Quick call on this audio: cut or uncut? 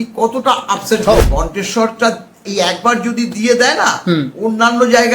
cut